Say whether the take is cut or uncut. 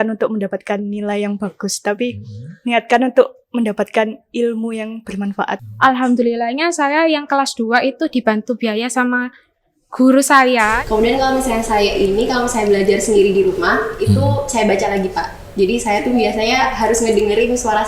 cut